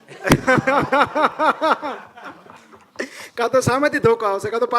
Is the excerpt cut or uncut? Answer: uncut